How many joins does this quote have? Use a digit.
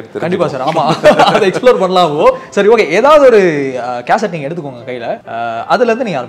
1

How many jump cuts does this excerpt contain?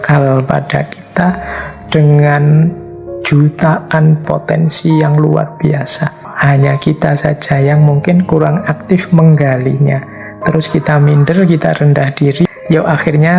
3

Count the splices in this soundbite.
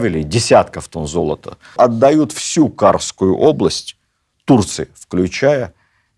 1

